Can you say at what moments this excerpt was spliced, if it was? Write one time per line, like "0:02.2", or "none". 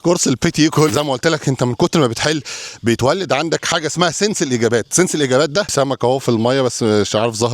0:00.9
0:05.7